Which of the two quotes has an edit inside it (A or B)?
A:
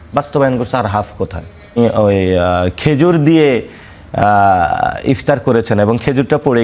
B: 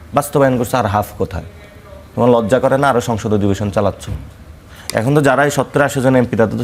A